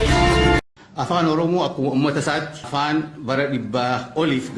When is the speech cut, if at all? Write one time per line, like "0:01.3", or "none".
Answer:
0:02.7